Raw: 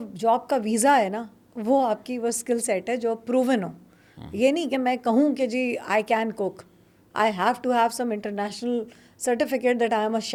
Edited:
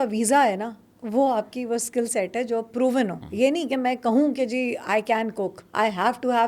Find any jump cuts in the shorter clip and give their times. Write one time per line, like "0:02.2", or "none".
0:03.2
0:05.6